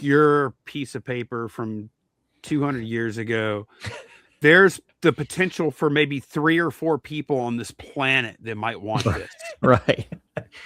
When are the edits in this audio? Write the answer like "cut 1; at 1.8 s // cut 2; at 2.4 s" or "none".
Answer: none